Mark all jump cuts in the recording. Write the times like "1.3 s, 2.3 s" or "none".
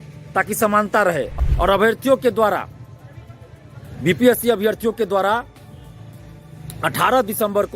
1.4 s